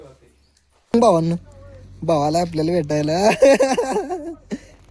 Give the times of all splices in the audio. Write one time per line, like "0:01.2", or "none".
0:00.9